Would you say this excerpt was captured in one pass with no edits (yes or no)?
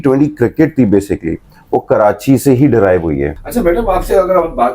no